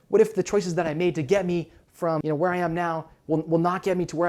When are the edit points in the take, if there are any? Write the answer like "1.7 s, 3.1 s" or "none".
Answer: 2.2 s